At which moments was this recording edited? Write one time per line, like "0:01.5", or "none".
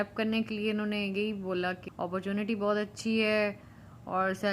0:01.8

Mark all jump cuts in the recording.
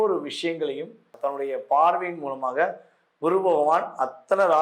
0:01.1

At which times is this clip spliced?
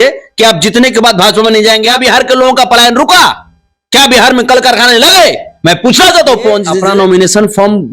0:02.0
0:06.7

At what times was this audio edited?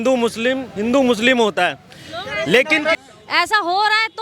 0:03.0

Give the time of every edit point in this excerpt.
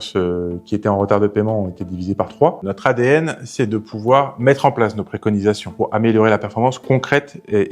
0:02.6
0:05.7

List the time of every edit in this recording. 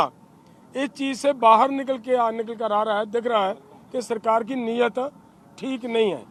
none

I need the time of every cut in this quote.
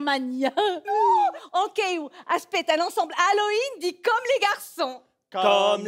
0:01.4

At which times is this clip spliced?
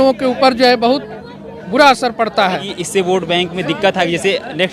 0:02.7

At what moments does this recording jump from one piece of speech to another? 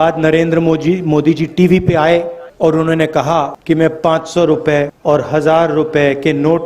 0:02.4
0:03.6
0:04.9

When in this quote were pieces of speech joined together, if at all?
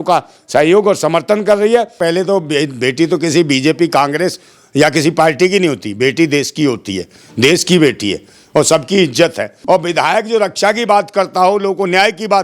0:01.9
0:09.5

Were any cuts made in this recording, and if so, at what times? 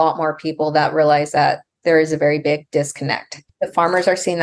0:03.5

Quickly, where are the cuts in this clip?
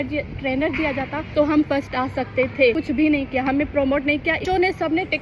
0:01.2
0:02.8
0:04.4

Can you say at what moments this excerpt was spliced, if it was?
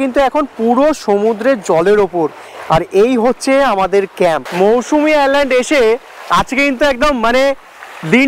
0:04.5

